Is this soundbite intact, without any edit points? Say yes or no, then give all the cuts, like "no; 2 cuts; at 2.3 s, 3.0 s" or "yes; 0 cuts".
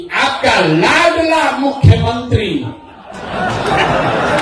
yes; 0 cuts